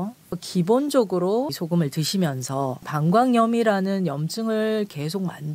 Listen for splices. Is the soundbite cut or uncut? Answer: uncut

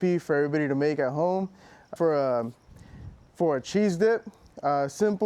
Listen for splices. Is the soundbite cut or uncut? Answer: cut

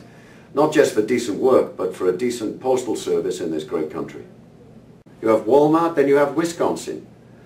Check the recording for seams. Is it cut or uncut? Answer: cut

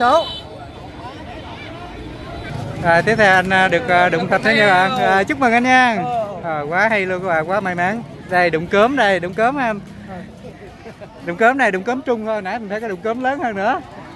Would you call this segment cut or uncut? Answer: cut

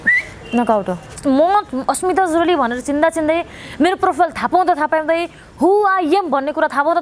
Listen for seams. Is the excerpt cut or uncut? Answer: cut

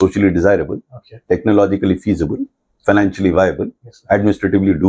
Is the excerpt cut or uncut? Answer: uncut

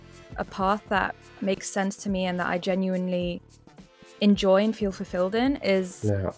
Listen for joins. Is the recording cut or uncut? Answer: uncut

